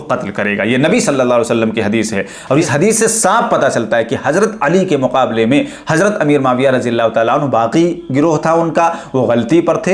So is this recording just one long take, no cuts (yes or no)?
no